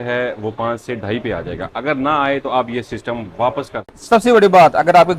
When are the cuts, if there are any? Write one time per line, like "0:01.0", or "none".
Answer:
0:03.9